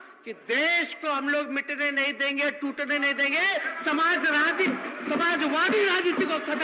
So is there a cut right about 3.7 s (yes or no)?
no